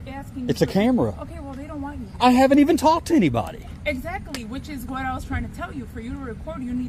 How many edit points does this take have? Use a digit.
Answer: 0